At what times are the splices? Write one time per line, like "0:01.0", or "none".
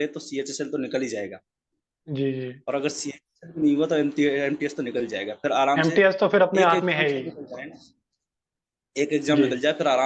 none